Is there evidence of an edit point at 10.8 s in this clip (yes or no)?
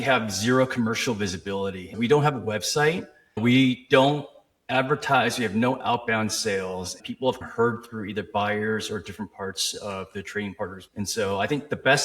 yes